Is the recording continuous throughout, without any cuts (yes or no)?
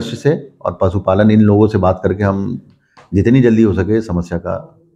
yes